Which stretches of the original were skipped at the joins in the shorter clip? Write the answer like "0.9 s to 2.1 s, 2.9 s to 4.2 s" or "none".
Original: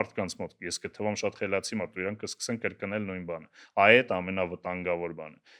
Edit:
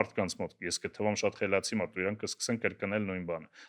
none